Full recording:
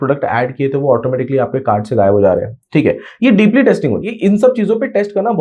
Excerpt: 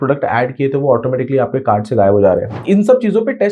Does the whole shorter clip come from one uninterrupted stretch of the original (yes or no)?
no